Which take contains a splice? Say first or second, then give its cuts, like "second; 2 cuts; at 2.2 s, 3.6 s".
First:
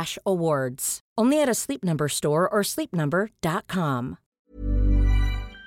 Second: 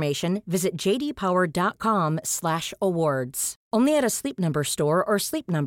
first; 1 cut; at 4.2 s